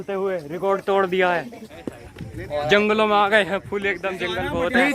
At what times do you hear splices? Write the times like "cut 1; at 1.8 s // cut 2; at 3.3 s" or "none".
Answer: cut 1; at 1.6 s